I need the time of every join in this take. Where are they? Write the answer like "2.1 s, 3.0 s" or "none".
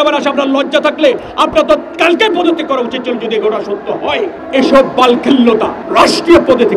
4.4 s, 5.8 s